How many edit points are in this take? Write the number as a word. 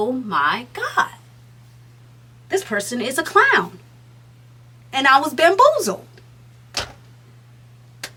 zero